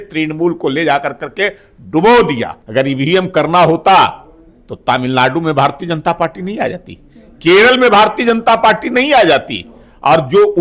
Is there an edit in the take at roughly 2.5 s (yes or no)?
yes